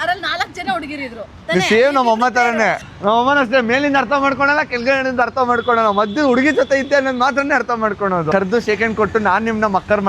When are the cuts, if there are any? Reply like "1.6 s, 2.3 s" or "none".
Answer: 1.3 s, 2.9 s, 8.3 s